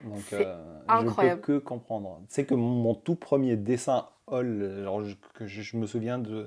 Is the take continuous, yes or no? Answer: yes